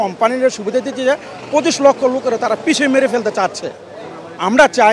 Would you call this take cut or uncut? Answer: uncut